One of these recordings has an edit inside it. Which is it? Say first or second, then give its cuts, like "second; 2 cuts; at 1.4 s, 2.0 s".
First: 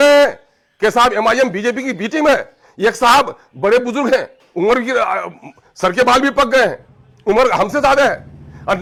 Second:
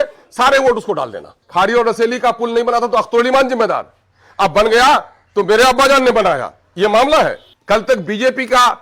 second; 2 cuts; at 1.3 s, 7.5 s